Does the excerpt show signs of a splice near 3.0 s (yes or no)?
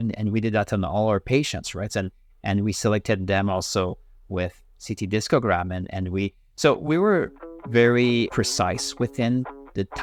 no